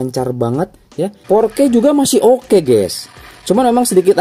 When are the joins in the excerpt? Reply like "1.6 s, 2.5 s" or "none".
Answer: 1.2 s

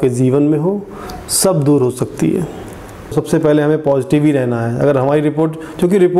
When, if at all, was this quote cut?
3.1 s

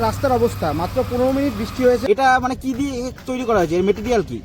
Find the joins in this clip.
2.0 s

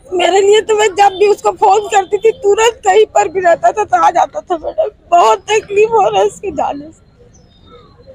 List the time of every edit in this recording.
none

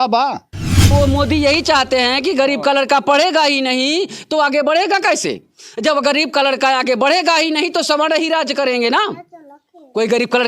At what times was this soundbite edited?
0.9 s

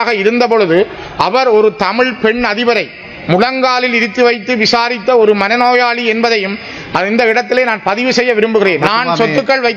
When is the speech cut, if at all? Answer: 8.8 s

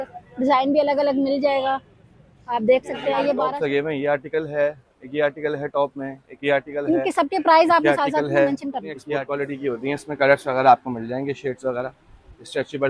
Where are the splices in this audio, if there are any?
3.4 s, 9.2 s

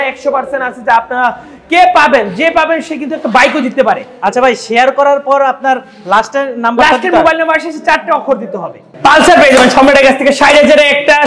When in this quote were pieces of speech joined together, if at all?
8.8 s

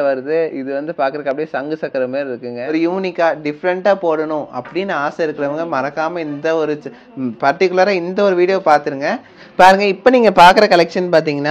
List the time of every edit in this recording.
2.6 s, 9.0 s

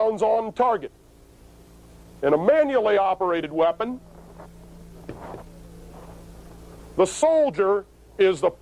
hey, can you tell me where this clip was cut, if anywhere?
none

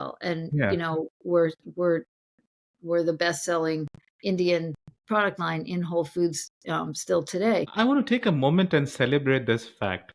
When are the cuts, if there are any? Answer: 7.7 s

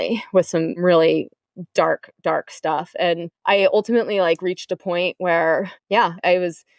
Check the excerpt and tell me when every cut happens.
0.8 s, 3.3 s

